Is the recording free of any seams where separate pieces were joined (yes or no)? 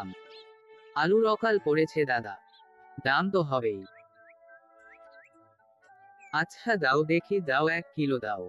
yes